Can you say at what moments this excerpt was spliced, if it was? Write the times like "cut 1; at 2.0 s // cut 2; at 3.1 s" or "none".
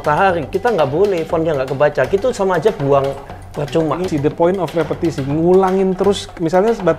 cut 1; at 4.0 s